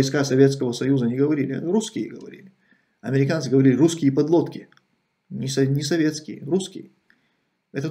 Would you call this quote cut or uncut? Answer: uncut